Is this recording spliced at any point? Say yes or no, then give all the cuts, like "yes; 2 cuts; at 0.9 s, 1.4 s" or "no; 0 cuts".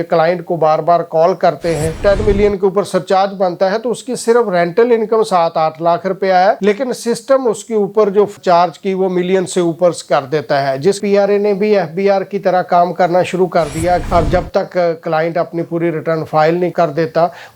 yes; 4 cuts; at 1.9 s, 8.3 s, 11.0 s, 14.0 s